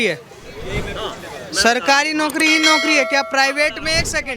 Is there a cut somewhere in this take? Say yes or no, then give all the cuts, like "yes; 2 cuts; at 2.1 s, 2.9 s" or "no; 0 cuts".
no; 0 cuts